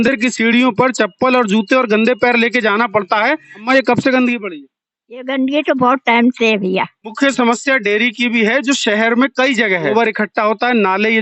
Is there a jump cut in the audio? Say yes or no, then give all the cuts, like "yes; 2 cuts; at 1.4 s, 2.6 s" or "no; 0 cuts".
yes; 3 cuts; at 3.4 s, 7.1 s, 9.9 s